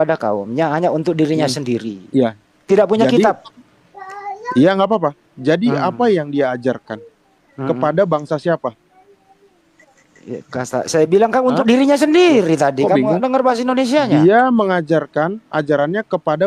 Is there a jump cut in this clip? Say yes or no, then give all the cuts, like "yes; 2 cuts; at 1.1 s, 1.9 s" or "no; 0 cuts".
no; 0 cuts